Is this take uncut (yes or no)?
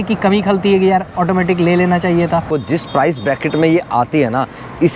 no